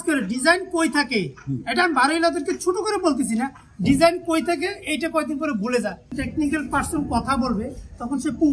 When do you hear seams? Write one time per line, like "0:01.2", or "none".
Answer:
0:06.2